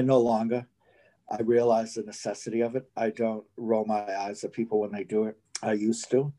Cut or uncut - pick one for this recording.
cut